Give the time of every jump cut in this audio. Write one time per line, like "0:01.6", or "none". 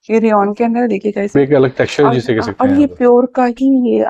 0:01.3